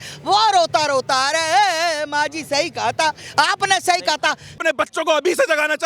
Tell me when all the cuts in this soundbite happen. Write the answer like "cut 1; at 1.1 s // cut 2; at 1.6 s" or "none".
cut 1; at 4.6 s